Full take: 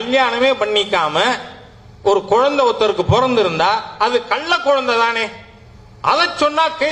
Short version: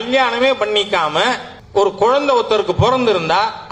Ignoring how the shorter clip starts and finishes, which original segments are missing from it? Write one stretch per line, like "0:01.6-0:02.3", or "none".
0:01.5-0:01.8